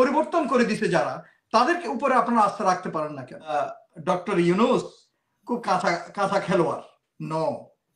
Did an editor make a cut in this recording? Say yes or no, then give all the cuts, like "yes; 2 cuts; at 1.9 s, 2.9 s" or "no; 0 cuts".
yes; 1 cut; at 3.5 s